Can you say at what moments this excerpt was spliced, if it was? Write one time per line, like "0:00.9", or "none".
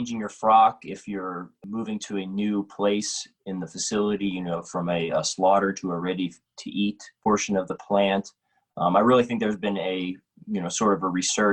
0:01.6
0:07.2